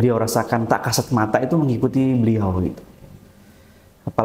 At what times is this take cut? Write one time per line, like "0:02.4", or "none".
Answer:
none